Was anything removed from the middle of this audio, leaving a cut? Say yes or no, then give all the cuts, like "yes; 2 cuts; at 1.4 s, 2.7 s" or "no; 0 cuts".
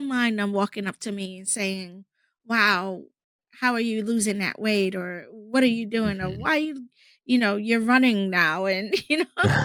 no; 0 cuts